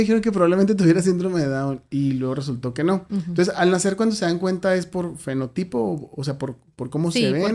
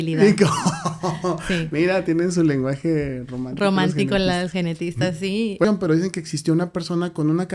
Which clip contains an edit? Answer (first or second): second